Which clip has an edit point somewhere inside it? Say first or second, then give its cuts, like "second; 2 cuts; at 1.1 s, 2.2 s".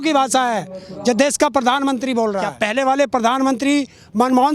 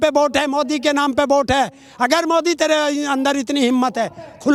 first; 1 cut; at 2.5 s